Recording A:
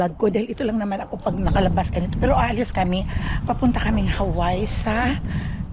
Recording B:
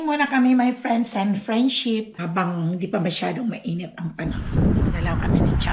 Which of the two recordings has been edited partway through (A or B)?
B